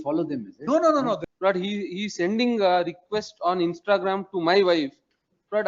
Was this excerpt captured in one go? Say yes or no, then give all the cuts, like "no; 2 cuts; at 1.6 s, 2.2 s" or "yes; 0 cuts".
no; 1 cut; at 1.3 s